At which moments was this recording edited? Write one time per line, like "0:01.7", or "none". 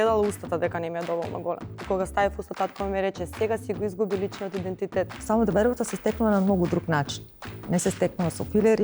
0:01.8
0:05.2